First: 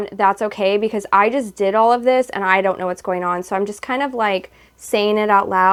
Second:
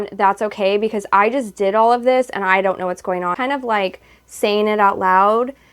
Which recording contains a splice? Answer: second; 1 cut; at 3.3 s

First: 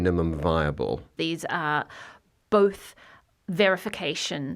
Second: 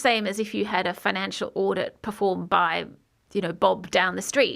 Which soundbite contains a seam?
first; 1 cut; at 1.1 s

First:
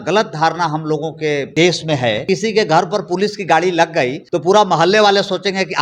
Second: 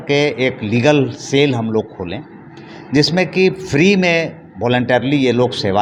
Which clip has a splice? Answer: first; 3 cuts; at 1.5 s, 2.2 s, 4.2 s

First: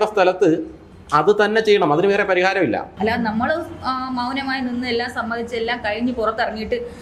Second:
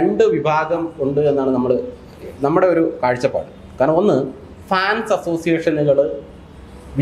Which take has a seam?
first; 1 cut; at 2.9 s

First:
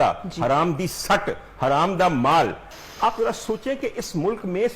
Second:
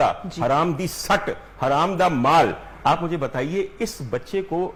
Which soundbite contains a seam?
first; 1 cut; at 2.7 s

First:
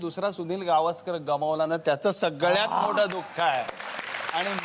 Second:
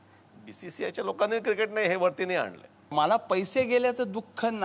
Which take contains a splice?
second; 1 cut; at 2.9 s

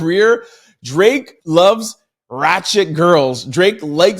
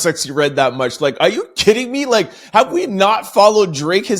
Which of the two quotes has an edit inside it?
first; 1 cut; at 1.3 s

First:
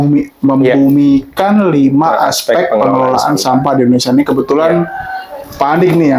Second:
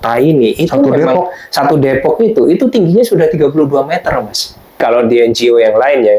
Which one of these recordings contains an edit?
second; 1 cut; at 4.8 s

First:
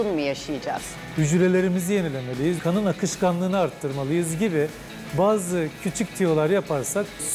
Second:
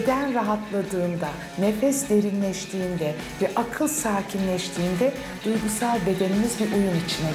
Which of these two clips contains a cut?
first; 1 cut; at 1.0 s

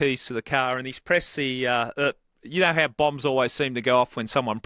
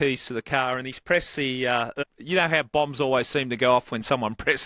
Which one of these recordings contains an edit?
second; 1 cut; at 2.0 s

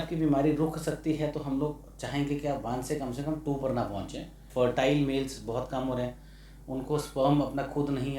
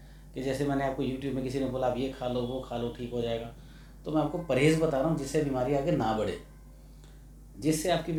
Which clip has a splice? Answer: first; 1 cut; at 4.5 s

